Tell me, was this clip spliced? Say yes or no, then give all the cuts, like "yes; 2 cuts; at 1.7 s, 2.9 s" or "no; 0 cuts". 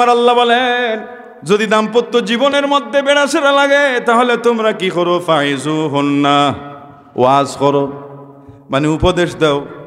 no; 0 cuts